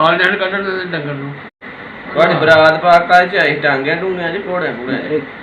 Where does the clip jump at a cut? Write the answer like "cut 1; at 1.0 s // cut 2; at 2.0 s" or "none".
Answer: cut 1; at 1.4 s

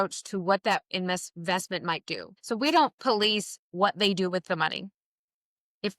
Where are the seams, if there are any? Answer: cut 1; at 2.3 s

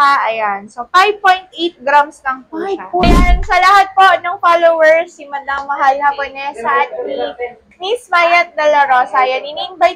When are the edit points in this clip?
cut 1; at 3.3 s

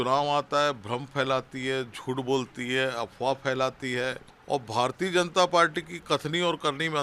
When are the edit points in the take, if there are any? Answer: cut 1; at 4.3 s

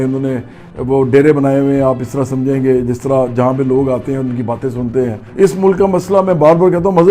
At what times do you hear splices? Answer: cut 1; at 5.3 s

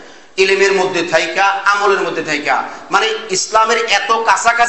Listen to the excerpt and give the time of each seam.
none

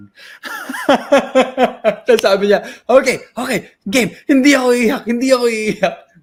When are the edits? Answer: none

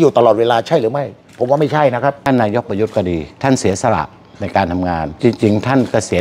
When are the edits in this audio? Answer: cut 1; at 2.2 s

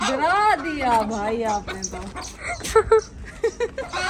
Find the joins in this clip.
cut 1; at 2.6 s

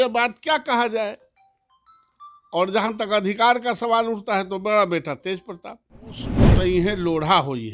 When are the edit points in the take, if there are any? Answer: cut 1; at 6.3 s

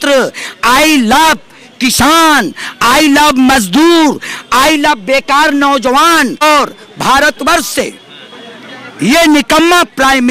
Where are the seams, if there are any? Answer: cut 1; at 6.4 s

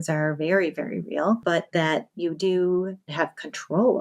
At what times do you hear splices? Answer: cut 1; at 1.4 s // cut 2; at 3.1 s

